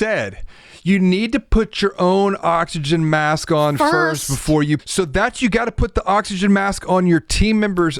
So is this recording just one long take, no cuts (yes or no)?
no